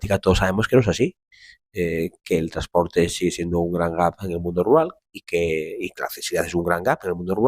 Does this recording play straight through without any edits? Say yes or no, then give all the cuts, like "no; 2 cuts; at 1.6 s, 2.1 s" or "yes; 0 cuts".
yes; 0 cuts